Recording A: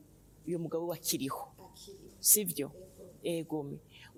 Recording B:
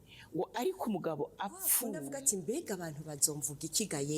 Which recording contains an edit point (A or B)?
B